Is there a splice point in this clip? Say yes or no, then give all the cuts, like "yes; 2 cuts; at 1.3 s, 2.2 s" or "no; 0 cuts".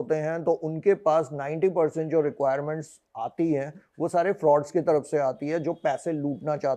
no; 0 cuts